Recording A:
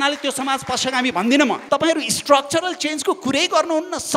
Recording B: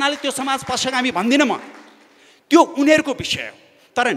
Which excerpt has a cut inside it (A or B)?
A